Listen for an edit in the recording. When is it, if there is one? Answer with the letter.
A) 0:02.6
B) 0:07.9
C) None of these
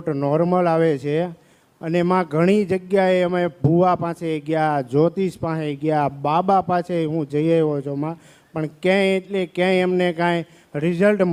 C